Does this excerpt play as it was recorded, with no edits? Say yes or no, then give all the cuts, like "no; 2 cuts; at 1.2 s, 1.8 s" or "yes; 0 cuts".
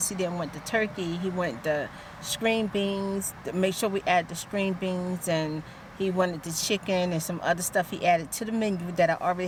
yes; 0 cuts